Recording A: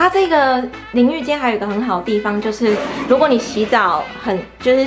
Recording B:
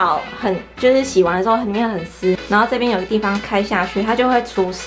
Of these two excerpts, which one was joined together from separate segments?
B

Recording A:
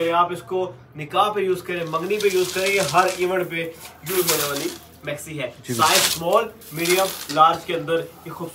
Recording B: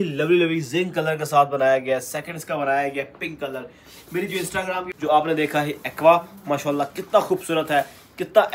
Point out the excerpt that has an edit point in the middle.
B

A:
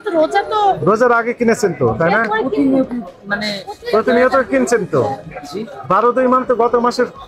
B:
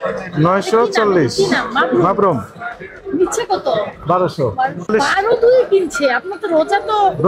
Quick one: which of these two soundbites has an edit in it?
B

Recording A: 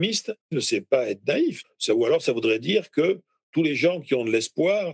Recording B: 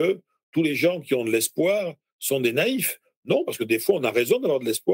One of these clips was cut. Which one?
A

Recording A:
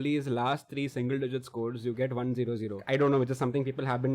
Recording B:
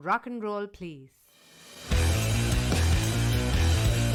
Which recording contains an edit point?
A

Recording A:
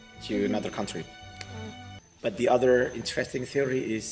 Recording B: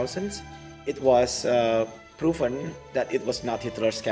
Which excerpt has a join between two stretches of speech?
A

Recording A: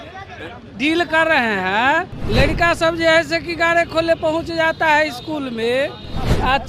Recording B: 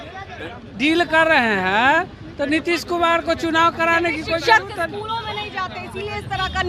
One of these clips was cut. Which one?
A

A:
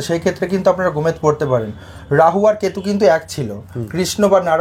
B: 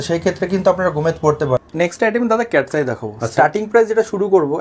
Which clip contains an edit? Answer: B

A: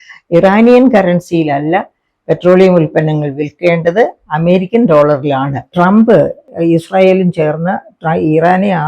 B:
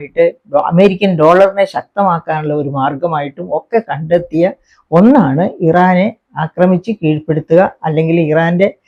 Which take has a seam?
A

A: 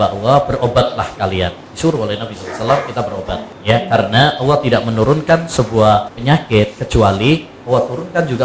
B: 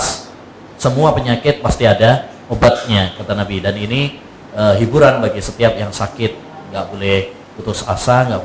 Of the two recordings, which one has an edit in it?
A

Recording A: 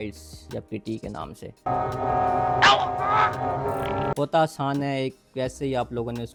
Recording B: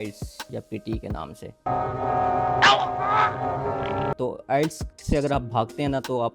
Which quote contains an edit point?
B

